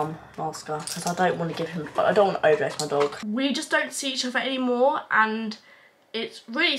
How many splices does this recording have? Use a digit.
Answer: 1